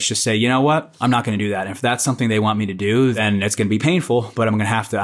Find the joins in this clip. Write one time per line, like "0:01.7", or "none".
0:00.9
0:03.2